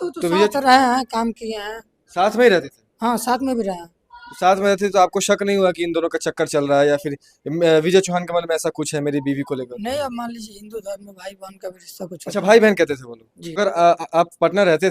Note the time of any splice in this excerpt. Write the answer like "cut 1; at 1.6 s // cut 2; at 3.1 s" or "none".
cut 1; at 13.6 s